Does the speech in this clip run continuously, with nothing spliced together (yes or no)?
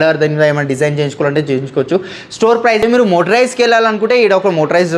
no